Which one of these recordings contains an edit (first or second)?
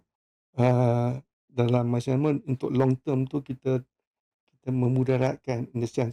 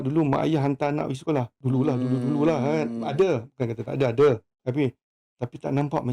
second